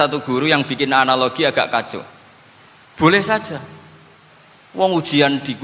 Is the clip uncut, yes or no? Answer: yes